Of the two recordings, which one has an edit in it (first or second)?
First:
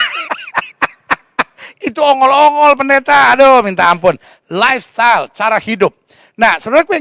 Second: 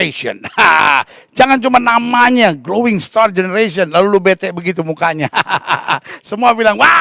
first